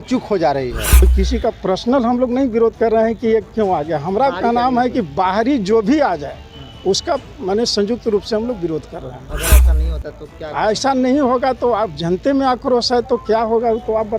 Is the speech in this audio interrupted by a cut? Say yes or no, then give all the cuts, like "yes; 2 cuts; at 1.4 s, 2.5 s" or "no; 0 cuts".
yes; 1 cut; at 1.1 s